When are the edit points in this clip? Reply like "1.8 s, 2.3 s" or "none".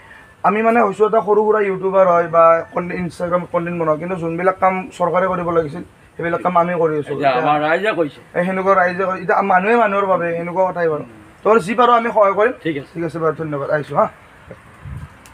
none